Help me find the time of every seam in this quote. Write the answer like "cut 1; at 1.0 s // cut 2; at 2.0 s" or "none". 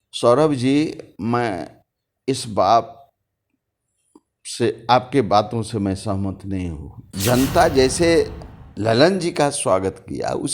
cut 1; at 7.1 s